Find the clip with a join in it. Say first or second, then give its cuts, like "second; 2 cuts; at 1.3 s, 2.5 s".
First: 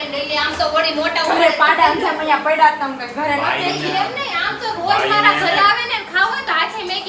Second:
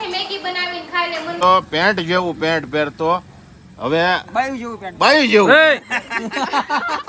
second; 1 cut; at 1.4 s